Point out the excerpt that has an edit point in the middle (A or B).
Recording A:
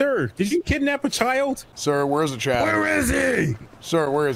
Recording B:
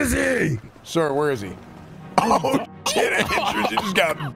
A